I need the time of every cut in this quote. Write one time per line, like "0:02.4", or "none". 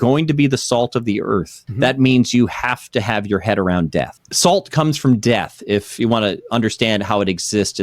0:01.6
0:04.2